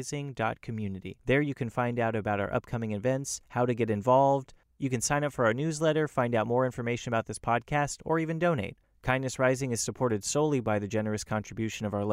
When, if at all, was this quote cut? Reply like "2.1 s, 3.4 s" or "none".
1.1 s